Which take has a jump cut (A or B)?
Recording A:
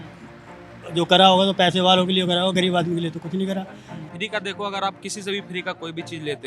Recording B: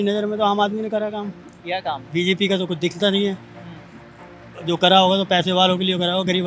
A